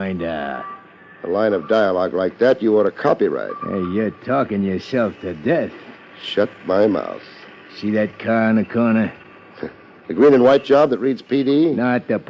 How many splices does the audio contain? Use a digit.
1